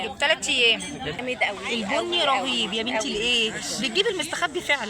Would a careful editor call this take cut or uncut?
cut